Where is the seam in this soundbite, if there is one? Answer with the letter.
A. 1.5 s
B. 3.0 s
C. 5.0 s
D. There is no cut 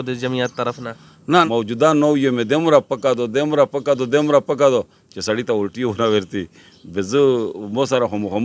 A